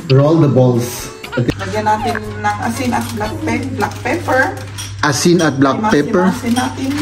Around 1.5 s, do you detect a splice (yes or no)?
yes